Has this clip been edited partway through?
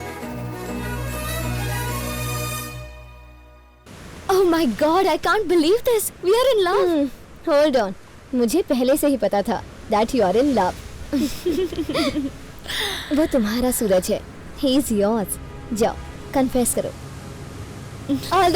yes; 1 cut; at 3.9 s

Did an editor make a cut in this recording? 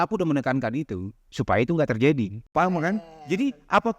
yes; 1 cut; at 2.4 s

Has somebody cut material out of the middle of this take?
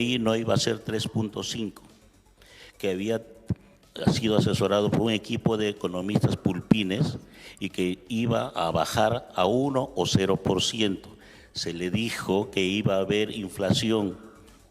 no; 0 cuts

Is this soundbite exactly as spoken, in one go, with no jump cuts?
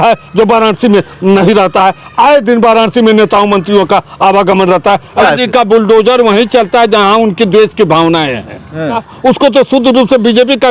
no; 2 cuts; at 5.2 s, 9.1 s

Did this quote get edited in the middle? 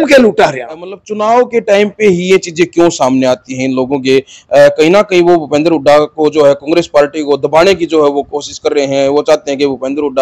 yes; 1 cut; at 1.1 s

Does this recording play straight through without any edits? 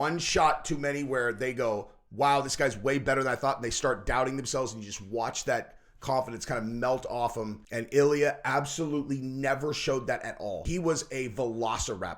no; 2 cuts; at 7.6 s, 10.6 s

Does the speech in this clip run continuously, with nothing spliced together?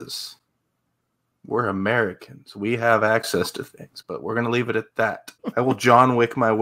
no; 1 cut; at 5.3 s

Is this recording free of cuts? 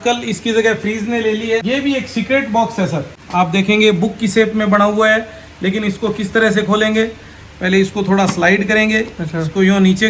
no; 2 cuts; at 1.6 s, 3.2 s

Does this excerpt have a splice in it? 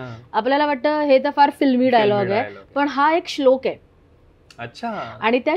no; 0 cuts

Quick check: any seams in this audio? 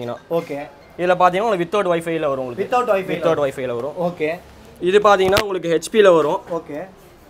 no; 0 cuts

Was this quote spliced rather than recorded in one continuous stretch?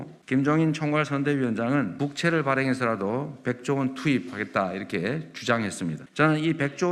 no; 0 cuts

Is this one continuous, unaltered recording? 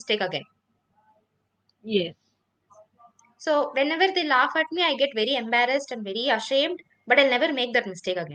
yes; 0 cuts

